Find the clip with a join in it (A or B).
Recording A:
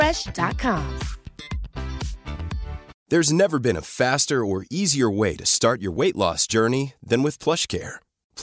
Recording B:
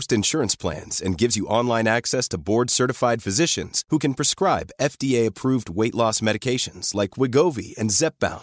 A